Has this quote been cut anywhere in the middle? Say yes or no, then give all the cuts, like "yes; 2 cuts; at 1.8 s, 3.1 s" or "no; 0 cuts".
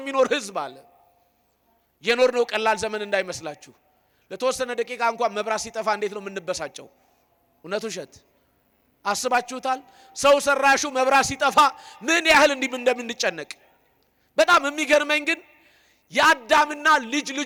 no; 0 cuts